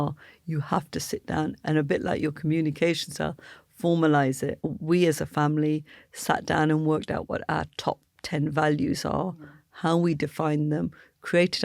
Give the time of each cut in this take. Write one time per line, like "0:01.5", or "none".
0:04.7